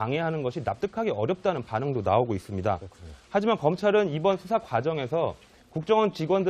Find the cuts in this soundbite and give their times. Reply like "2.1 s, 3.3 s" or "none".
4.1 s